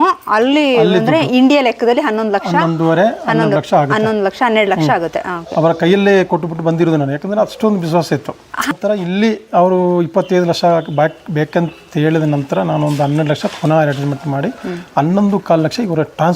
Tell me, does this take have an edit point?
yes; 1 cut; at 8.7 s

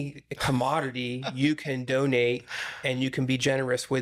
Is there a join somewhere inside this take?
no; 0 cuts

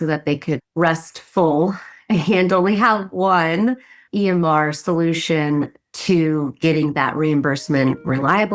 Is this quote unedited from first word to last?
yes; 0 cuts

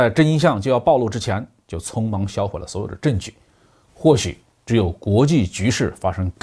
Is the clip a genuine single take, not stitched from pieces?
yes; 0 cuts

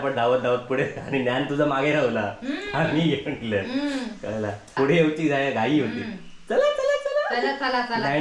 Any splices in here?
yes; 1 cut; at 4.7 s

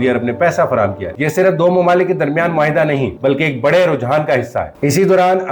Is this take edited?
yes; 1 cut; at 1.1 s

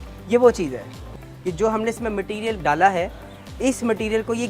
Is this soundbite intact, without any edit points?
no; 1 cut; at 1.1 s

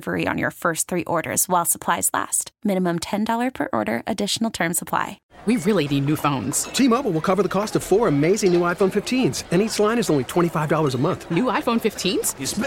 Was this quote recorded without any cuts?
no; 1 cut; at 5.2 s

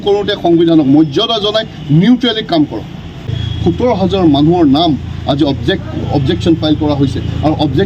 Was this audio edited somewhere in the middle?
yes; 1 cut; at 3.3 s

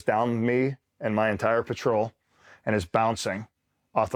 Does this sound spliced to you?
no; 0 cuts

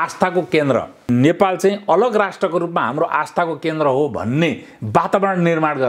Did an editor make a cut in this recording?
yes; 1 cut; at 1.1 s

